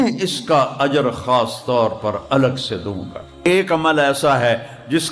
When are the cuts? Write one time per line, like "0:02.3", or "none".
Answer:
0:03.4